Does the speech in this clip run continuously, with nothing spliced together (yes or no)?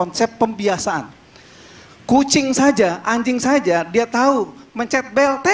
yes